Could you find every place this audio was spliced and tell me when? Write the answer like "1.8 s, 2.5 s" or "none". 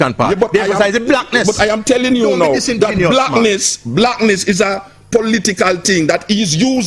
none